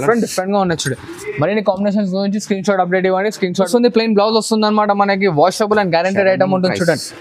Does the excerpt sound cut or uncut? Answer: cut